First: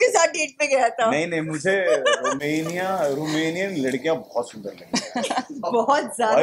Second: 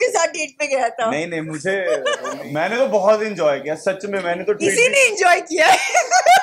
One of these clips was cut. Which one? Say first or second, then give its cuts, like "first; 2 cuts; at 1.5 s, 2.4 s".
second; 1 cut; at 2.3 s